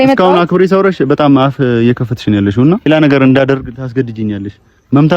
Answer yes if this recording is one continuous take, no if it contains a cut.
no